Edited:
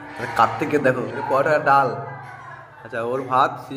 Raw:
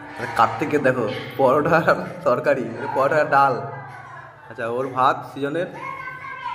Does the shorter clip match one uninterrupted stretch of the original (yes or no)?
no